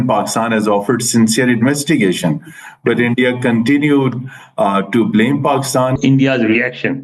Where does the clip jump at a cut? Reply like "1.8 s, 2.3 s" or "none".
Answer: 6.0 s